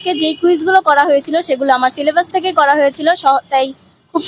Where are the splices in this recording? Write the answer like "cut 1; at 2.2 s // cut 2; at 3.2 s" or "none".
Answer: none